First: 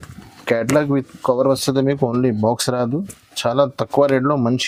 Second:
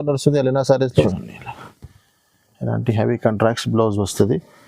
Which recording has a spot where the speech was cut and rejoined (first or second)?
second